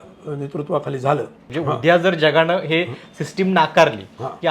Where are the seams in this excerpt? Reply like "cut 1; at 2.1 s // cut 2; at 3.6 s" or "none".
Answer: cut 1; at 1.4 s